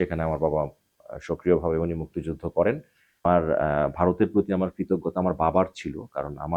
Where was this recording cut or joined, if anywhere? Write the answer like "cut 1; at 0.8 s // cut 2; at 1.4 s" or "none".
cut 1; at 3.2 s